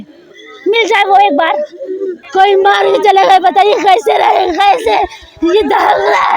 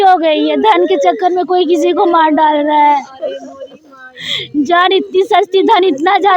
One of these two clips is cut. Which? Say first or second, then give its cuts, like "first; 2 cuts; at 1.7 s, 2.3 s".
first; 1 cut; at 2.2 s